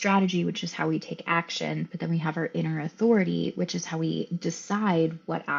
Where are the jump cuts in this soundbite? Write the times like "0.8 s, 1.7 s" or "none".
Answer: none

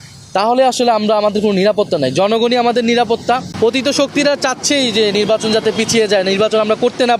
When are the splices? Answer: 3.5 s

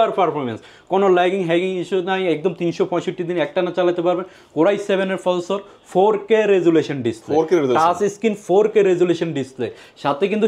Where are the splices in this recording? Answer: none

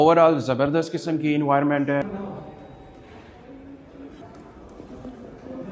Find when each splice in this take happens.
2.0 s, 4.2 s

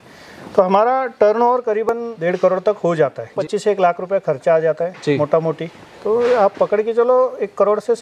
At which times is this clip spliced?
1.9 s, 3.4 s

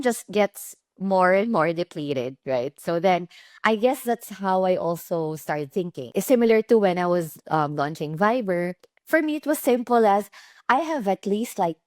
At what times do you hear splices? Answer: 6.0 s

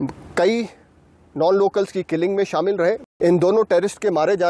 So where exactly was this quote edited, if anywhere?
3.1 s

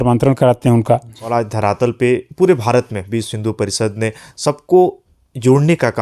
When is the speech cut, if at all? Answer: 1.3 s

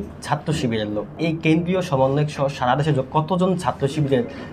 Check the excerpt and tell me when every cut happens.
1.2 s

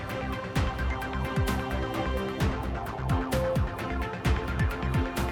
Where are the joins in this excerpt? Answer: none

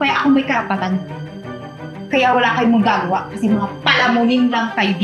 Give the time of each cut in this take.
none

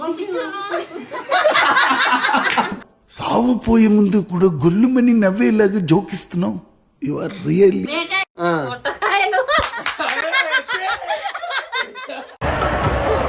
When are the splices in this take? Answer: 7.8 s

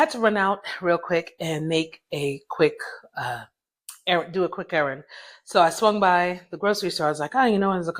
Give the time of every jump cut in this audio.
none

